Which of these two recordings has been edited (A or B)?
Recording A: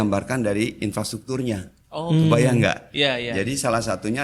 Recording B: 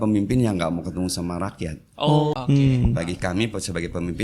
B